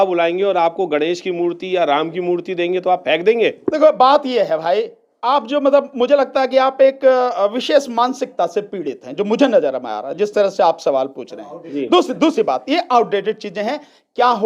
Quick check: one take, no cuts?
yes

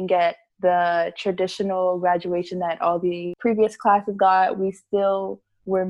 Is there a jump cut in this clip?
yes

